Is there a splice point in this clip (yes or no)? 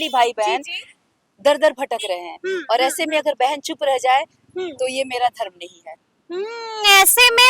no